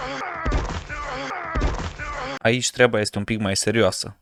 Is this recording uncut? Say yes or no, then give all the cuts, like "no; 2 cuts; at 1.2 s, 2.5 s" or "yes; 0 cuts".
yes; 0 cuts